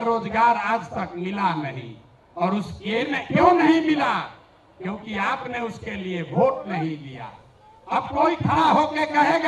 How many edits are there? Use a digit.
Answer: 0